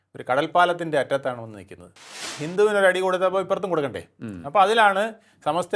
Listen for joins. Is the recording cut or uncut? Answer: cut